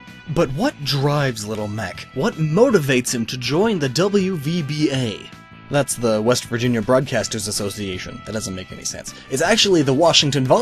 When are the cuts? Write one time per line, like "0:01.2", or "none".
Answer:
0:08.5